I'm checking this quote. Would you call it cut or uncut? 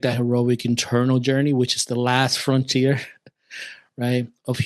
uncut